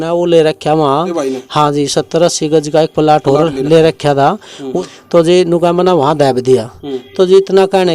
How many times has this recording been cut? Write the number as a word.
two